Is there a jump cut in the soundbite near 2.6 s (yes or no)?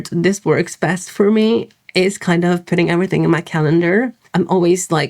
no